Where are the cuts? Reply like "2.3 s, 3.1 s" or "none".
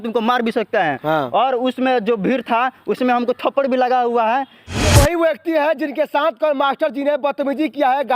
4.7 s